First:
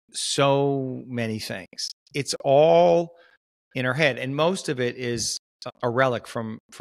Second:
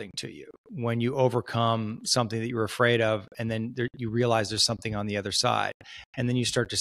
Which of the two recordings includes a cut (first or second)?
first